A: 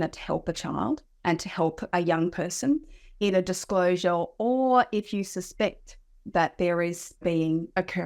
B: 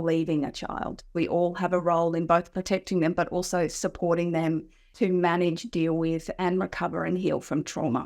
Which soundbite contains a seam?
B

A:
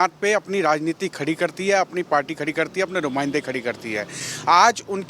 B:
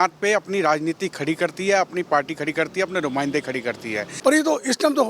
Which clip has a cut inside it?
B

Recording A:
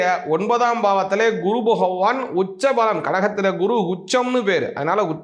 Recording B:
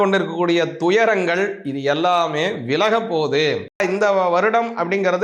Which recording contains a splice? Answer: B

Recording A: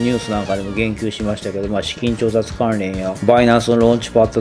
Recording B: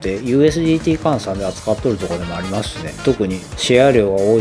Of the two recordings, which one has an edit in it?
B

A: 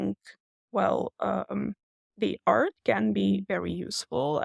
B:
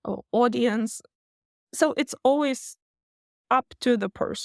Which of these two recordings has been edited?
B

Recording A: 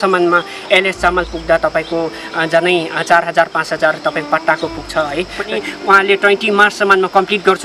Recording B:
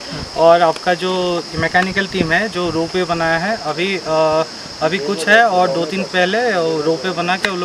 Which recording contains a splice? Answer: A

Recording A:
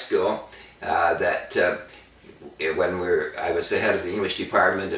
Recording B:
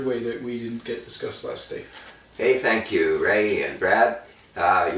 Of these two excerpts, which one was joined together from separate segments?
A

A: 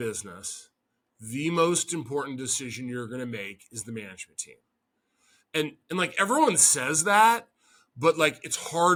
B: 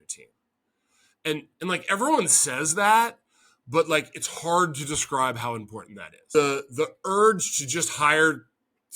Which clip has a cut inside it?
B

